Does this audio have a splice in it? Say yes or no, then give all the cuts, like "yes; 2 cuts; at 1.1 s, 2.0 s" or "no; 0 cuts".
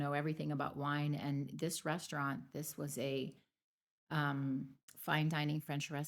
no; 0 cuts